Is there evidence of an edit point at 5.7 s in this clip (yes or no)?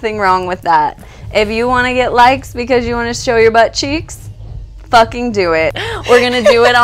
yes